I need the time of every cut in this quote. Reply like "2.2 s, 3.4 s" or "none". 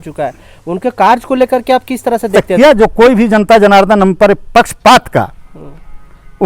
2.4 s